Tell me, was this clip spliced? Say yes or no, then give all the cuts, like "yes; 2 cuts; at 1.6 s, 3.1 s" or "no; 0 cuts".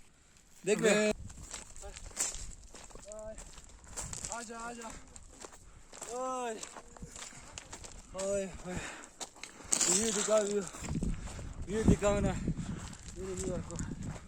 yes; 1 cut; at 1.1 s